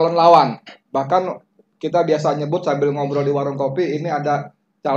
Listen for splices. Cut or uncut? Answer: uncut